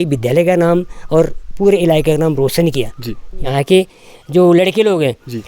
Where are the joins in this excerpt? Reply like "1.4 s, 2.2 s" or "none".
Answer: 3.5 s